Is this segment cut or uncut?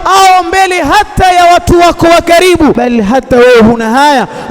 cut